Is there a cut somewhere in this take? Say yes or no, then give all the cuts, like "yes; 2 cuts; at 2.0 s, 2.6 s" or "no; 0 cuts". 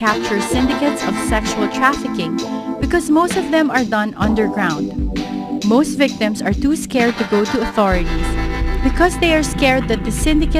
no; 0 cuts